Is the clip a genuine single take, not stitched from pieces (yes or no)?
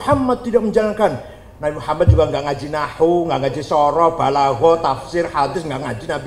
yes